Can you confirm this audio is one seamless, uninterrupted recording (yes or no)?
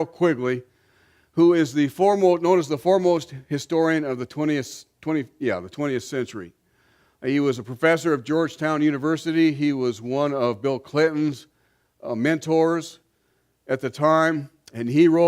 no